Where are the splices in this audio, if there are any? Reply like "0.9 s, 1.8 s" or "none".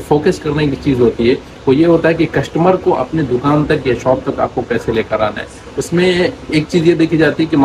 none